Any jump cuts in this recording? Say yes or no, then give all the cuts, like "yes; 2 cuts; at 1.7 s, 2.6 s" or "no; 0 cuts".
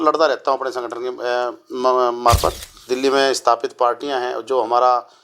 yes; 1 cut; at 2.8 s